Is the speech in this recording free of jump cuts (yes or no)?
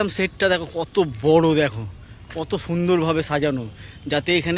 yes